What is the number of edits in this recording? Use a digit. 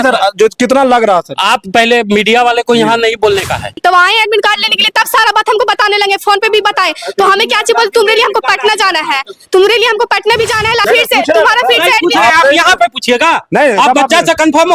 2